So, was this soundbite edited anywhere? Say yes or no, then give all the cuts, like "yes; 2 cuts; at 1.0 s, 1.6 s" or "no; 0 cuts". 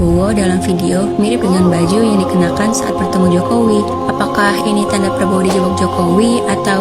no; 0 cuts